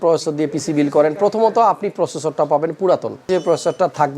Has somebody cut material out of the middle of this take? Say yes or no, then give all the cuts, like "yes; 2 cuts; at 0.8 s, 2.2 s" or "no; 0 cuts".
yes; 1 cut; at 3.3 s